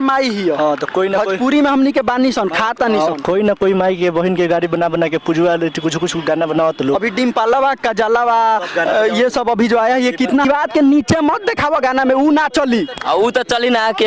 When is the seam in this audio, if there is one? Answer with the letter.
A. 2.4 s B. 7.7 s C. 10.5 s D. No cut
C